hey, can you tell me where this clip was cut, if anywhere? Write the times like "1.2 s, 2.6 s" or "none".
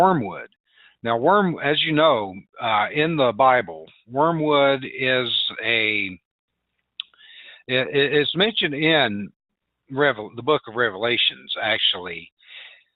none